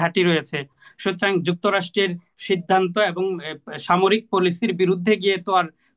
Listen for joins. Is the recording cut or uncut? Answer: uncut